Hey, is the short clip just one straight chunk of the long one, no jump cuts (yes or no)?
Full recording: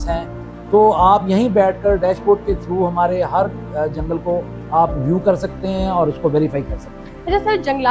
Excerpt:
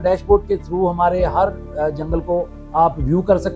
yes